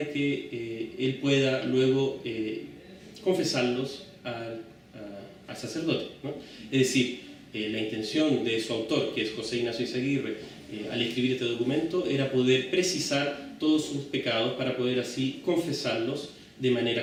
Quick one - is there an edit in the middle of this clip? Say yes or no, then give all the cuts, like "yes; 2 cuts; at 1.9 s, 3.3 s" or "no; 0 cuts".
no; 0 cuts